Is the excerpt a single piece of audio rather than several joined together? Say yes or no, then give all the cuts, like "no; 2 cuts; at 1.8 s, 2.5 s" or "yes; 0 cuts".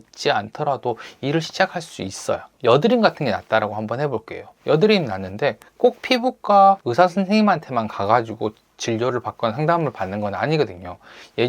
no; 1 cut; at 2.5 s